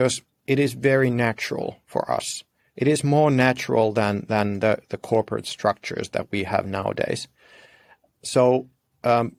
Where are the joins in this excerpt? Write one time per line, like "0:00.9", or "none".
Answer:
none